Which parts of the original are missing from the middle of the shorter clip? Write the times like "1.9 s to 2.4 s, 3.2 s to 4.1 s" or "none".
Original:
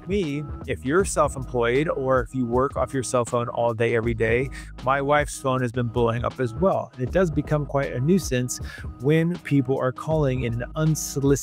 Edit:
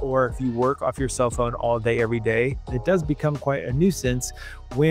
4.6 s to 7.0 s

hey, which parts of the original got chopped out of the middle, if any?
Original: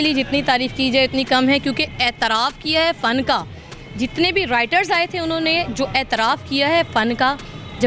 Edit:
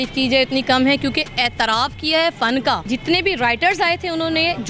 3.4 s to 3.9 s

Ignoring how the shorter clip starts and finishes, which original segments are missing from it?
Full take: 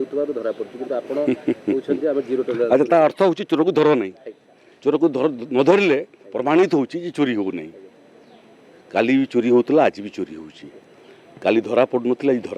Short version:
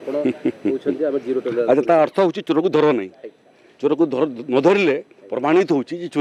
none

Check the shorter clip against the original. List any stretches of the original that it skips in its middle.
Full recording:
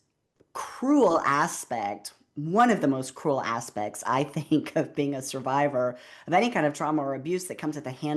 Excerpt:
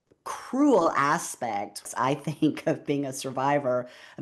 2.1 s to 3.9 s

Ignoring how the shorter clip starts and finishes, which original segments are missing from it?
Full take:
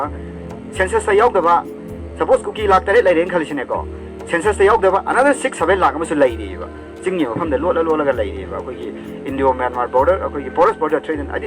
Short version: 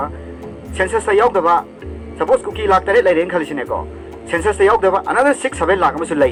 none

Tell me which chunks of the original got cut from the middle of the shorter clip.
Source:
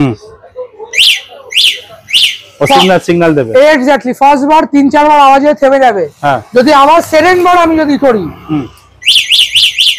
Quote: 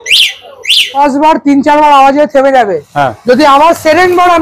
1.8 s to 4.2 s

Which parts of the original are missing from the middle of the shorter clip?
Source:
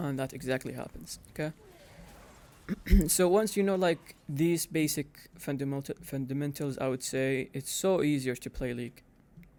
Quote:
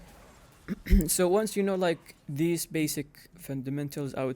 5.3 s to 6.0 s

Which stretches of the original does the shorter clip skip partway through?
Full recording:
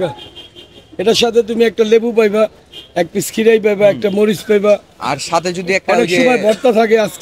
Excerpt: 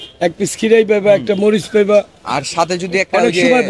none

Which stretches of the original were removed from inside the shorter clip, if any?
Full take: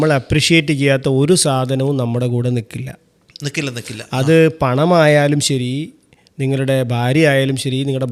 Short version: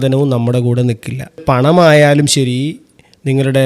3.1 s to 4.5 s

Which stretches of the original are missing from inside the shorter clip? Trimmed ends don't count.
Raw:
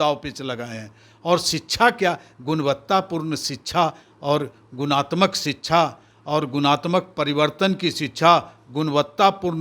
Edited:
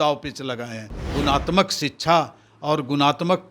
1.0 s to 4.6 s

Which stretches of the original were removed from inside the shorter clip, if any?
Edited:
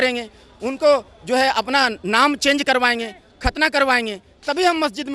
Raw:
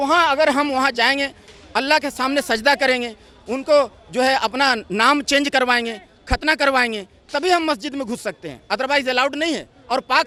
none

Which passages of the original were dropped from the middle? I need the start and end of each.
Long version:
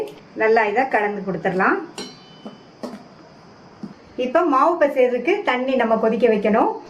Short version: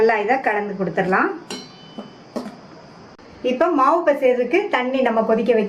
3.7 s to 4.0 s

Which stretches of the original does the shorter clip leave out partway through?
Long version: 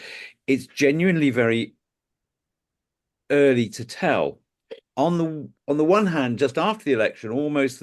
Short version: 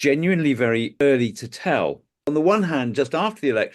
1.8 s to 3.4 s, 4.5 s to 5.5 s

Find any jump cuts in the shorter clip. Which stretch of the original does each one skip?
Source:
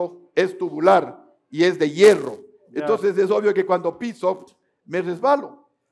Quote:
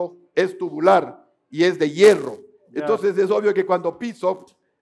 none

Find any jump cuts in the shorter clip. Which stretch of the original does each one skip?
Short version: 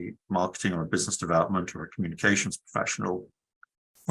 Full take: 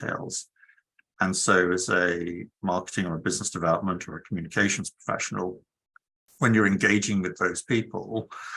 none

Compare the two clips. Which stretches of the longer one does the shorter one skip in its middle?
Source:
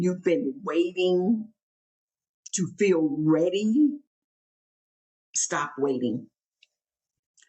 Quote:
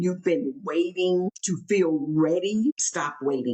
1.3 s to 2.4 s, 3.8 s to 5.3 s

